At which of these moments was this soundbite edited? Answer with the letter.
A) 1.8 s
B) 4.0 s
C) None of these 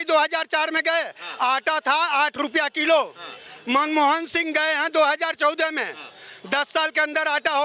C